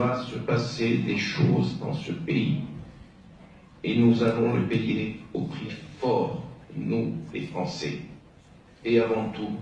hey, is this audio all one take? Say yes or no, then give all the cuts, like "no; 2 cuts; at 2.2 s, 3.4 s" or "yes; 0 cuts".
yes; 0 cuts